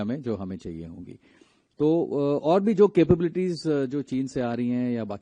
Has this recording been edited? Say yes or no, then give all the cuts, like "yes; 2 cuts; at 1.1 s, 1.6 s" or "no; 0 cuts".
no; 0 cuts